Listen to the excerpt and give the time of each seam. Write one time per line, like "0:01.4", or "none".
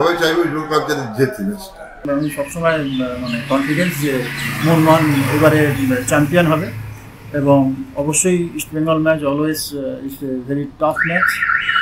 0:02.0